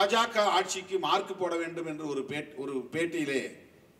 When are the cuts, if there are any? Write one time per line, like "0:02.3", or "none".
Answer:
none